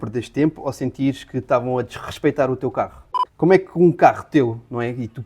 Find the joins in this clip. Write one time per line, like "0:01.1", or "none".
0:03.0